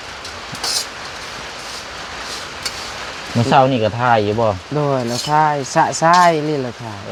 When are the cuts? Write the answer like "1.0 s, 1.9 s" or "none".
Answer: none

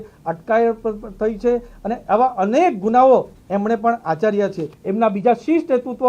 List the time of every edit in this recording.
4.7 s

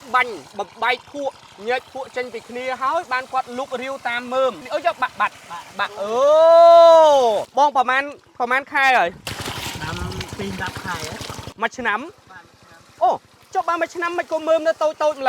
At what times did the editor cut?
4.6 s, 7.5 s, 10.3 s

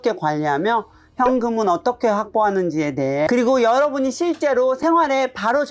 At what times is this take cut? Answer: 3.3 s

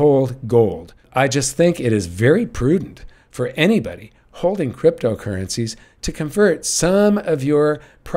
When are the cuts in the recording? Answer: 1.0 s

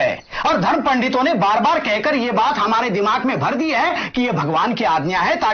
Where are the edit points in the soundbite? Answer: none

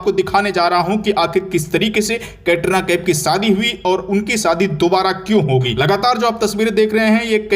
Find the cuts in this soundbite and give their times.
5.7 s

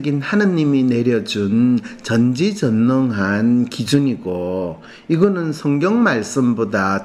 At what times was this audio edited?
none

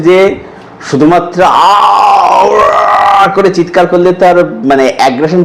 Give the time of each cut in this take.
none

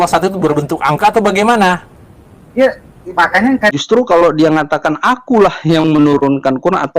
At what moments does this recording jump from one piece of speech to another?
3.7 s

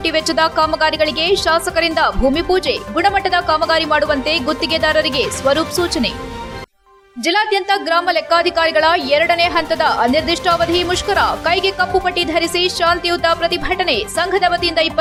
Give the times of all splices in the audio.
none

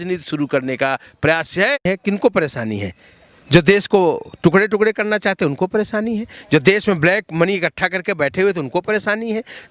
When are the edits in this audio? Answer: 1.8 s

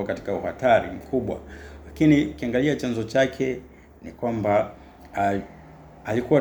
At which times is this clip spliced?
none

